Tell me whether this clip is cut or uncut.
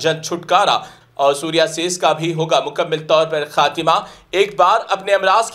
cut